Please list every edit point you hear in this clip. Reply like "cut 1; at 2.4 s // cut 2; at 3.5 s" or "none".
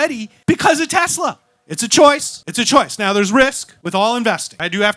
none

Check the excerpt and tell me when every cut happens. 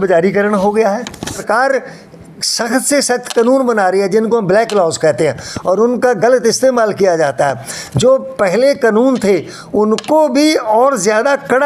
cut 1; at 1.4 s

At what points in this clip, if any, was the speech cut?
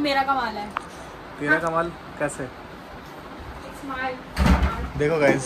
none

